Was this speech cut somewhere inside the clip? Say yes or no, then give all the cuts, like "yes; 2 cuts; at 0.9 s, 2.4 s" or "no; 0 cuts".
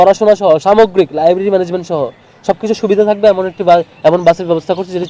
no; 0 cuts